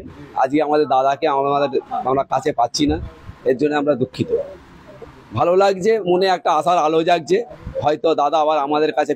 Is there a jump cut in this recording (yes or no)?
yes